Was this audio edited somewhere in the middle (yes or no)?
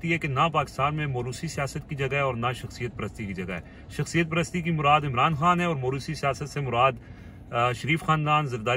no